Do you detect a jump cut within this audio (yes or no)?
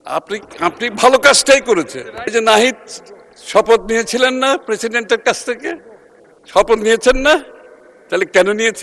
yes